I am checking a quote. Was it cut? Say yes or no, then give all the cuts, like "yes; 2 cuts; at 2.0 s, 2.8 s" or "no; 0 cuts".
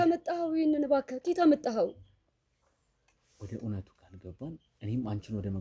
no; 0 cuts